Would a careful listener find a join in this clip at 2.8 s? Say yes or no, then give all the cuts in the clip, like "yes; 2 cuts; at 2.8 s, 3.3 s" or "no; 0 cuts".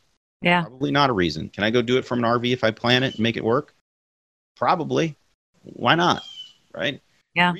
no; 1 cut; at 1.5 s